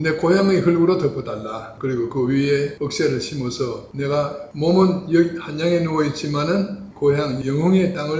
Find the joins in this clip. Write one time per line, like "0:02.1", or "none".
0:06.8